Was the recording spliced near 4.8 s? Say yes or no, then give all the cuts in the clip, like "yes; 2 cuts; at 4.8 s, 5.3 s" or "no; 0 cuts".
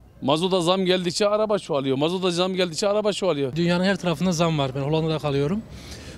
no; 1 cut; at 3.5 s